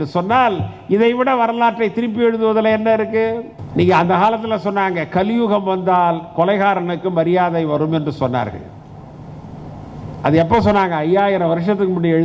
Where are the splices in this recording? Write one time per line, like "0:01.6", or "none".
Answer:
0:03.5

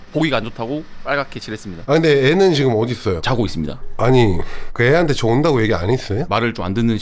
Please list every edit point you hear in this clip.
0:01.7
0:03.9
0:04.6
0:06.2

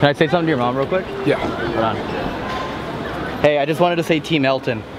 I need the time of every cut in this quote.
none

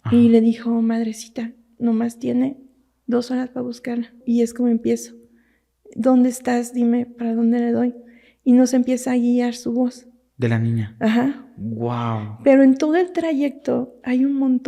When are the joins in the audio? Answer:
0:04.2

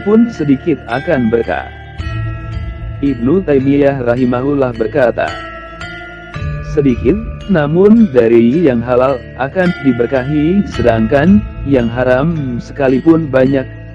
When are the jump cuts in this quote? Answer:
none

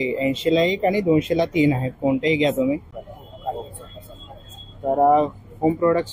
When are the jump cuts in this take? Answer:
0:02.9

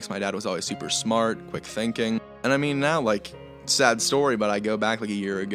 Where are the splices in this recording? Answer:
0:02.3

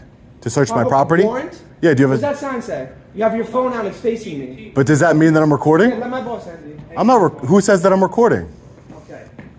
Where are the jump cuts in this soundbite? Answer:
none

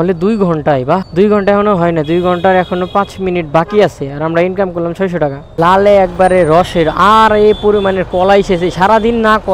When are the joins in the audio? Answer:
0:05.4

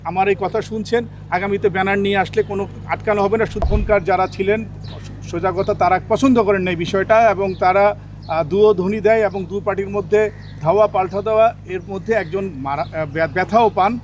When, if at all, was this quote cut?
0:03.6

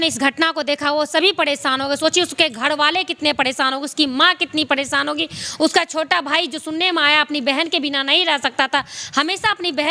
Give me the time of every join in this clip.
none

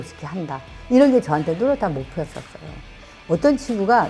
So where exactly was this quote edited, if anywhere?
0:03.0

